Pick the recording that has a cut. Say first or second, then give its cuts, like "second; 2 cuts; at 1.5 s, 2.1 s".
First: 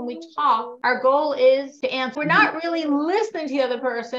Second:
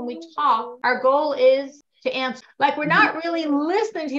first; 1 cut; at 2.1 s